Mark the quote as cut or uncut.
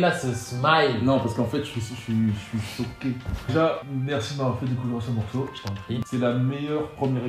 cut